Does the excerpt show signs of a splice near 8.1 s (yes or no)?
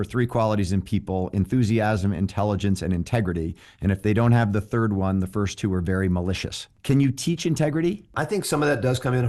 yes